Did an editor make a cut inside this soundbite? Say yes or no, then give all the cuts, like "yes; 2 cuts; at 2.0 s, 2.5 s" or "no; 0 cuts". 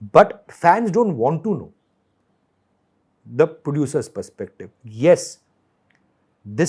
no; 0 cuts